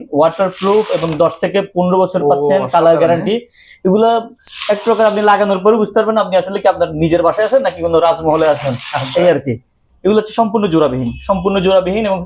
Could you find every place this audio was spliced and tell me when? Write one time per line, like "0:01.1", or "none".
none